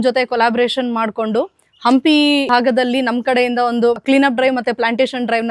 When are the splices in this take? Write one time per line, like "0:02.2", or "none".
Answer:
0:02.5
0:04.0